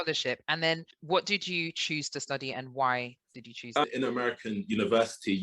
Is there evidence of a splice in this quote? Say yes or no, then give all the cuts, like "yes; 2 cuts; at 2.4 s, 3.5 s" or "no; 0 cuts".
yes; 1 cut; at 3.9 s